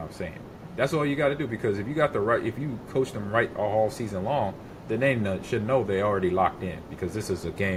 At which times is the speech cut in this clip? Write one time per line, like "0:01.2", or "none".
none